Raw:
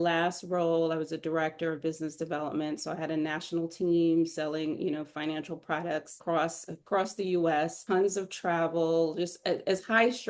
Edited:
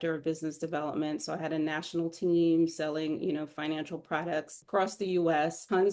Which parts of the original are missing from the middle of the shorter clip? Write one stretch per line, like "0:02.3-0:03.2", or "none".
0:06.1-0:06.7